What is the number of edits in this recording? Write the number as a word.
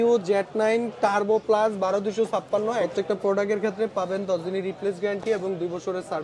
one